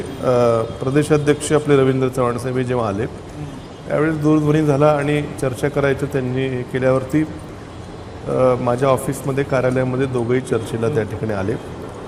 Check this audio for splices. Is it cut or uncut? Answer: uncut